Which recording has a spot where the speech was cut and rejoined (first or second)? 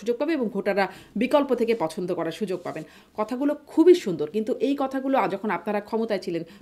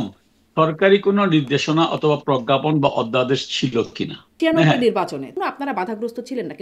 second